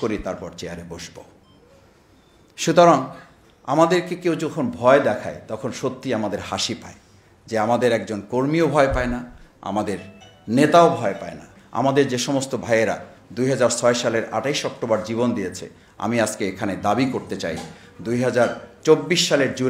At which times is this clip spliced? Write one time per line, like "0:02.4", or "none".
0:11.6